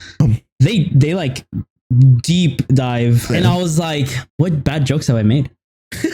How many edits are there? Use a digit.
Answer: 2